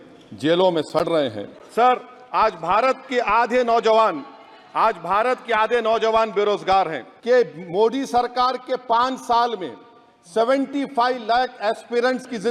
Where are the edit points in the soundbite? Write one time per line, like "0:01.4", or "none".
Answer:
0:01.5
0:07.1